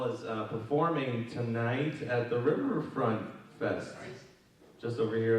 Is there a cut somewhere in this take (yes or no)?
no